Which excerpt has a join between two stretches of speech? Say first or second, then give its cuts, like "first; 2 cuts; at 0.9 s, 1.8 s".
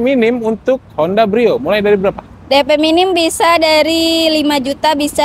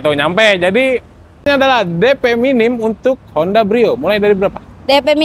second; 1 cut; at 1.5 s